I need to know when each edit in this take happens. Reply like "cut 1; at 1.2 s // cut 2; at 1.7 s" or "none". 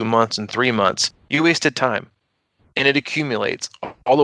cut 1; at 1.1 s